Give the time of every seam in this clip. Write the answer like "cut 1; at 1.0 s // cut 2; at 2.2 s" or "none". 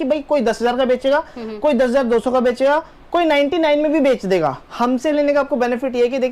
cut 1; at 4.6 s